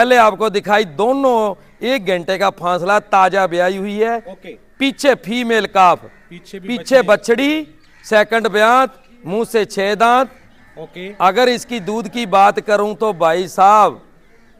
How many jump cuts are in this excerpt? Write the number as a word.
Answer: zero